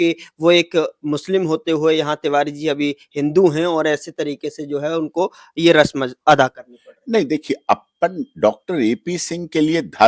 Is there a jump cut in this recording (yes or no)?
no